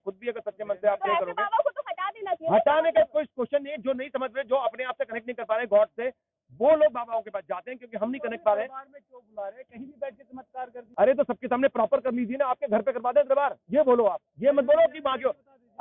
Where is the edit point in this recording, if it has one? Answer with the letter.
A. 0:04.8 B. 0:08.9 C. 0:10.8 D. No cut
C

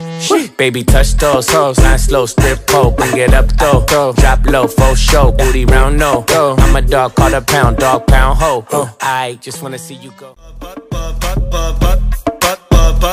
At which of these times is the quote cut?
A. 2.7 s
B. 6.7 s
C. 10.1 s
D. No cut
C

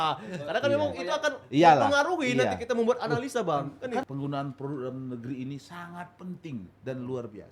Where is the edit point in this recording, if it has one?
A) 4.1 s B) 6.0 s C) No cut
A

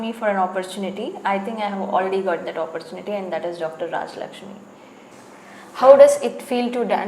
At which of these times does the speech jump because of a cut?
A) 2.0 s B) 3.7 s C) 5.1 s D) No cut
C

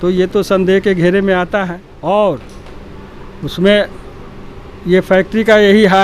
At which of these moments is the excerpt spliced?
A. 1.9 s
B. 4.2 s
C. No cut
A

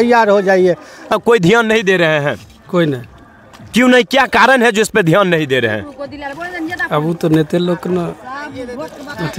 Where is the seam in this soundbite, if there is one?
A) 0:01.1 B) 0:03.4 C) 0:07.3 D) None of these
A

